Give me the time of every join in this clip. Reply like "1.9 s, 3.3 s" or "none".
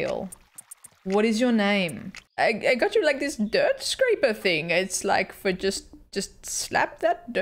2.2 s